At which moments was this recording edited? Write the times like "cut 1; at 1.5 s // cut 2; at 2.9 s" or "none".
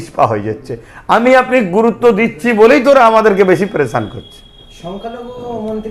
none